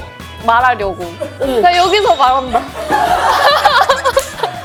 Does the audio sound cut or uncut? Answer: uncut